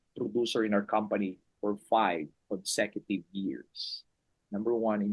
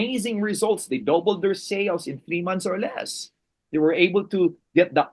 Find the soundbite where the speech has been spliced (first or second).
first